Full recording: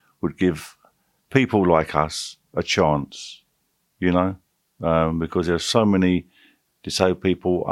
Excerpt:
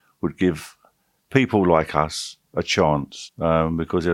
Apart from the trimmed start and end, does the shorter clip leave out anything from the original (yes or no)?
yes